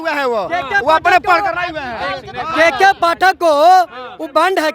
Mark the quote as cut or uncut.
uncut